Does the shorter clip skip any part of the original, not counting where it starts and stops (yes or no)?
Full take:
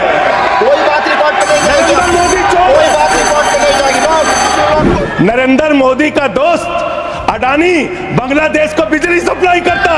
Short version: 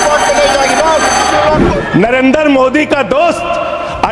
no